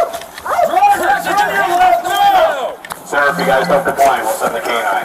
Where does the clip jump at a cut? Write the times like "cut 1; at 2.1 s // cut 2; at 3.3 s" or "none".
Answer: cut 1; at 2.8 s